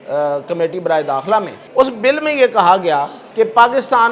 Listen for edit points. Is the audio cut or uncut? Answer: cut